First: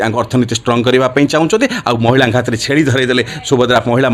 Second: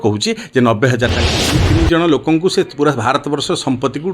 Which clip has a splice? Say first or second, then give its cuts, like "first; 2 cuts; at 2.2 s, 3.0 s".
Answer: second; 1 cut; at 1.4 s